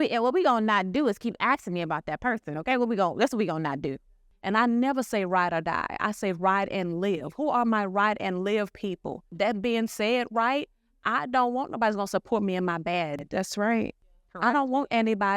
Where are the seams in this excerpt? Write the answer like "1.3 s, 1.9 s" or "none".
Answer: 4.2 s